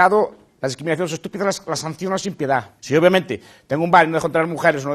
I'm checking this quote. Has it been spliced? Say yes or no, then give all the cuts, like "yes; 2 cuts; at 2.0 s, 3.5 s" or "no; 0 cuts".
yes; 1 cut; at 2.8 s